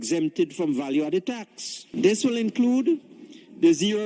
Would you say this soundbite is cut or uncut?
cut